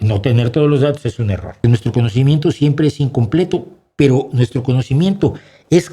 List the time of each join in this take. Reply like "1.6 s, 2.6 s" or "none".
1.6 s